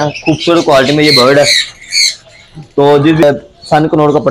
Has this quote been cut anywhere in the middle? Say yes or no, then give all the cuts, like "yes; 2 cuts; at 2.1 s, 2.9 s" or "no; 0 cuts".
yes; 1 cut; at 3.2 s